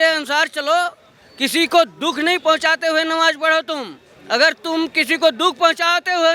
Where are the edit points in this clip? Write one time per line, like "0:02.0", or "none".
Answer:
none

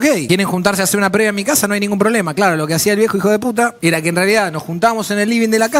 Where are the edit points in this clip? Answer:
none

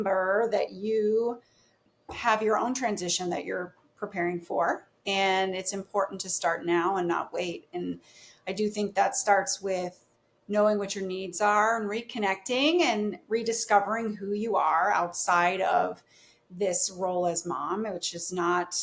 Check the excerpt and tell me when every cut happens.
0:01.8

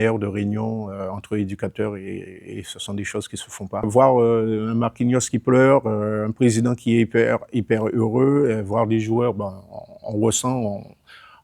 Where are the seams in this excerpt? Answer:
0:03.9

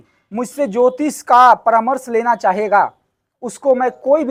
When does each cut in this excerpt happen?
none

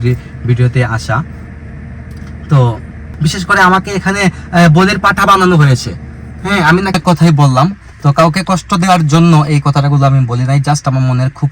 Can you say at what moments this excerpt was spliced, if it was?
0:03.1
0:06.9

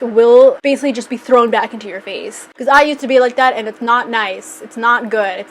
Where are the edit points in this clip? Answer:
0:02.4

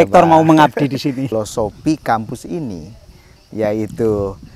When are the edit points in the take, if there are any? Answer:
0:01.3

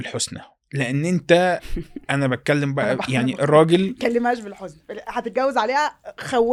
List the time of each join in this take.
none

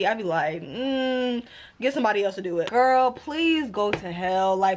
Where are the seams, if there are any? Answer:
0:02.7

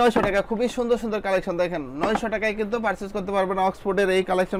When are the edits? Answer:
none

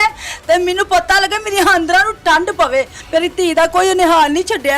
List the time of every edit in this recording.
0:03.0

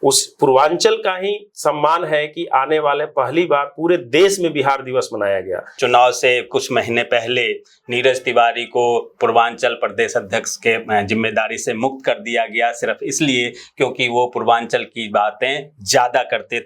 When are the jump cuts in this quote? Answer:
0:05.7

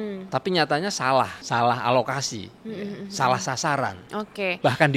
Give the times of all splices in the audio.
0:01.4

